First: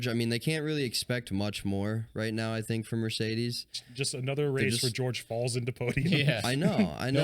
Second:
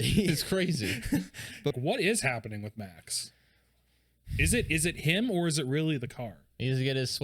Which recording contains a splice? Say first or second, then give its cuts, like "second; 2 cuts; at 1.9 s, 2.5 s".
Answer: second; 1 cut; at 1.7 s